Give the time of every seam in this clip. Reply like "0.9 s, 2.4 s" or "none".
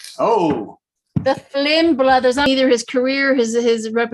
2.5 s